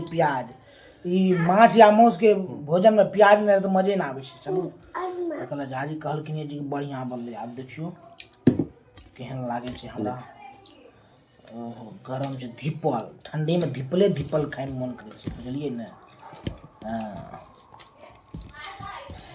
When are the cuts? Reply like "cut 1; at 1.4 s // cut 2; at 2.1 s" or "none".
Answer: none